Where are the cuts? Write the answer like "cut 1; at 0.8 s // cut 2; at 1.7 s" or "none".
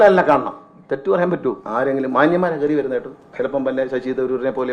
cut 1; at 1.6 s